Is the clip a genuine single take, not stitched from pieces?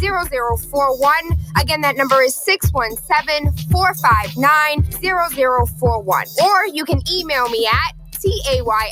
yes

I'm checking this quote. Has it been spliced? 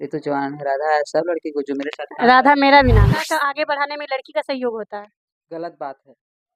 yes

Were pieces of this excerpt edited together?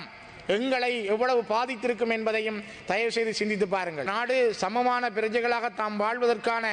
yes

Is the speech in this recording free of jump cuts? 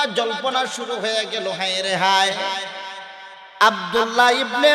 yes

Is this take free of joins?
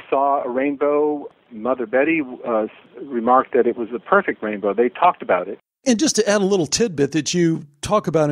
no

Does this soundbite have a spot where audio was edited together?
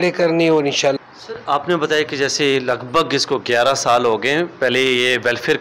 yes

